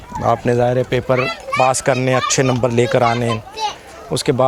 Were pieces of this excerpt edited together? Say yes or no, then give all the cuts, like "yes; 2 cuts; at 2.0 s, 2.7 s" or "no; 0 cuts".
no; 0 cuts